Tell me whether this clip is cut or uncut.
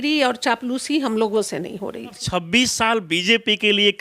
cut